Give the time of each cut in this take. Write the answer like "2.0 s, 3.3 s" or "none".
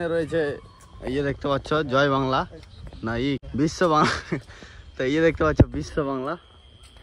none